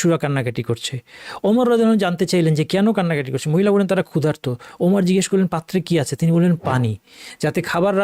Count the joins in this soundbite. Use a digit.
0